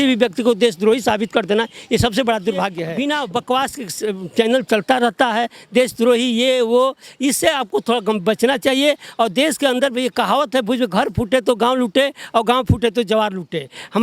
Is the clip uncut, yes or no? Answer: no